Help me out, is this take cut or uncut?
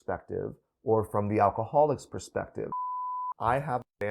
cut